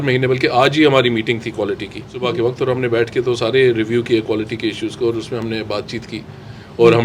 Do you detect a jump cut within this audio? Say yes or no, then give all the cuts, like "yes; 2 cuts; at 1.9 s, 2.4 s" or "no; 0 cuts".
yes; 1 cut; at 2.2 s